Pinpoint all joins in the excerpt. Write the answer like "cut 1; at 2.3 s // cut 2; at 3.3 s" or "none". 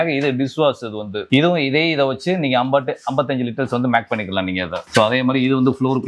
none